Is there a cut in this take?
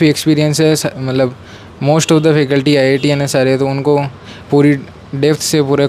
no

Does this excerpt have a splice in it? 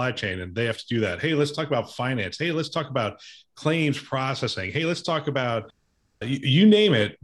no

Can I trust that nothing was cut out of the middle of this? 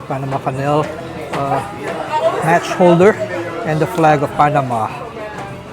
yes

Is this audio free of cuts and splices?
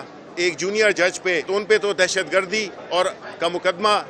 no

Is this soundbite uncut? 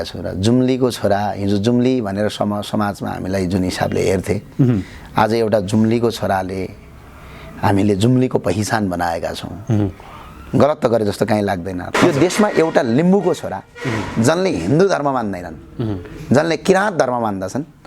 no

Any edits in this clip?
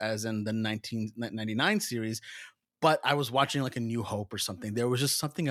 no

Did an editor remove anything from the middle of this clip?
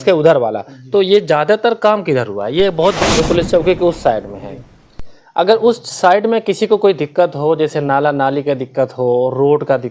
yes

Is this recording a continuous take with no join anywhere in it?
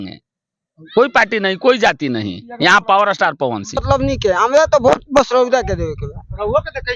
no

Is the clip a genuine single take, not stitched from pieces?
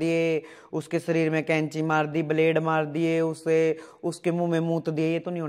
yes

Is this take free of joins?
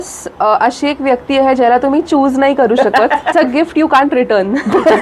no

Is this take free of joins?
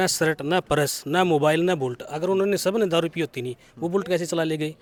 yes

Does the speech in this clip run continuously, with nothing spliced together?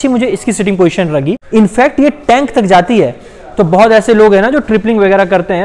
no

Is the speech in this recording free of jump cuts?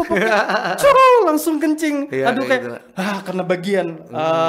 yes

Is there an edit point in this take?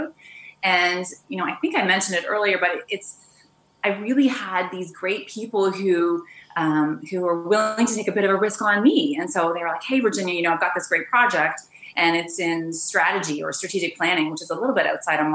no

